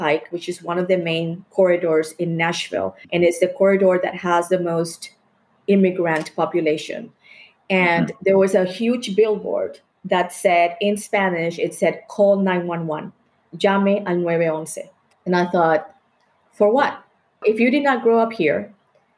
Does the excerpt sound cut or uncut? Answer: cut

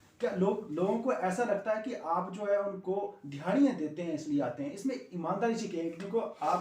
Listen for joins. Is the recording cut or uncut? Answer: uncut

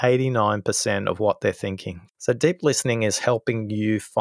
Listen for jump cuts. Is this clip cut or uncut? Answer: cut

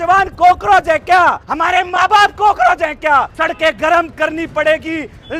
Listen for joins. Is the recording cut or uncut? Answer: cut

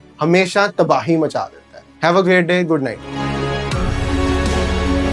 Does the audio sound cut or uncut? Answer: uncut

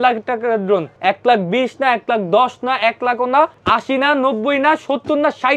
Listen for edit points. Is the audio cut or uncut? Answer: cut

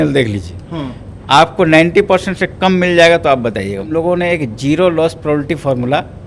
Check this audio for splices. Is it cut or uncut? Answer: cut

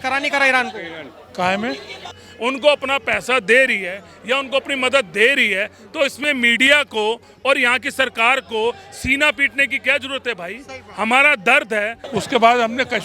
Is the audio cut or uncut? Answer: cut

